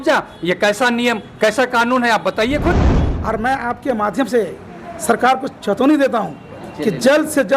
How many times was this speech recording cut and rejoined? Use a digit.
1